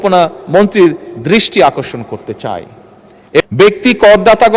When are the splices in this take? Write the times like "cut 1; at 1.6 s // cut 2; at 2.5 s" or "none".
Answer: cut 1; at 3.4 s